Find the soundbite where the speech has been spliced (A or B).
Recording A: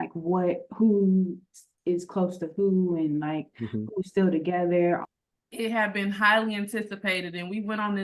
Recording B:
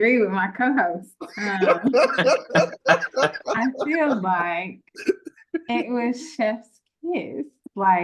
A